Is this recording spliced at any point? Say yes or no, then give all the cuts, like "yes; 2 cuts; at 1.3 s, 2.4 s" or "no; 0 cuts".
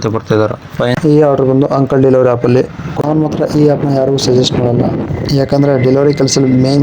yes; 2 cuts; at 0.9 s, 3.1 s